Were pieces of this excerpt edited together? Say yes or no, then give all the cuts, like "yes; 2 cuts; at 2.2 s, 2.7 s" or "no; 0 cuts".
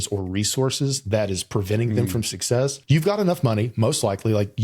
yes; 1 cut; at 2.8 s